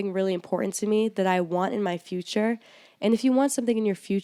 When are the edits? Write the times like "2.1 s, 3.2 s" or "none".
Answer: none